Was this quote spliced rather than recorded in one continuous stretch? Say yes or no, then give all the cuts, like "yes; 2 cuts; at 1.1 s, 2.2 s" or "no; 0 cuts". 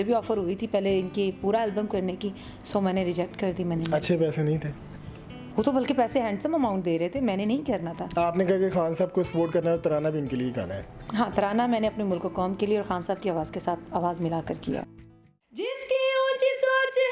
yes; 1 cut; at 14.8 s